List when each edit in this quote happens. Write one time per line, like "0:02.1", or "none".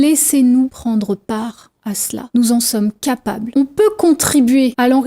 0:03.5